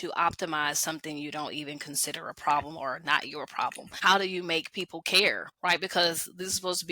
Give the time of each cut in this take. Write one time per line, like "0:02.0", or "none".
0:03.9
0:05.5